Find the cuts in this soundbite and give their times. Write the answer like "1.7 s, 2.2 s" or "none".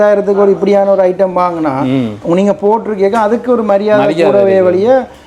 none

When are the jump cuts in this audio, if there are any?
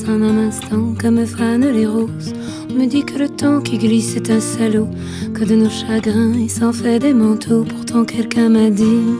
none

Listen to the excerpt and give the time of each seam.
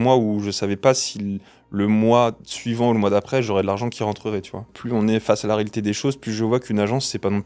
4.7 s

